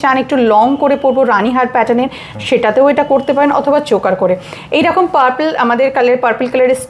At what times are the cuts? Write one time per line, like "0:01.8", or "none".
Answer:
none